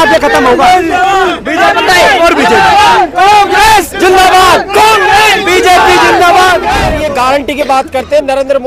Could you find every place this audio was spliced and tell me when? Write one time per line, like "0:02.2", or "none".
0:06.9